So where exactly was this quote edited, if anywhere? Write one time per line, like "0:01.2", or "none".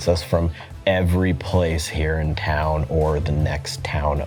none